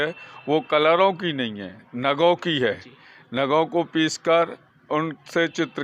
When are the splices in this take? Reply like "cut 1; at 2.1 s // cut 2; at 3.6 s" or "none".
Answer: none